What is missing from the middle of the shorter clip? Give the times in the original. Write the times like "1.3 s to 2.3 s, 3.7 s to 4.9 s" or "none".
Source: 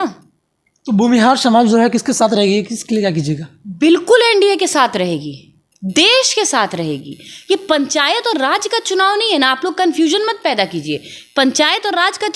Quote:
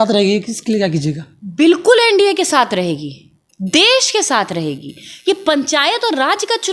none